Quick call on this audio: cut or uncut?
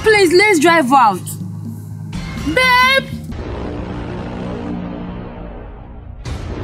cut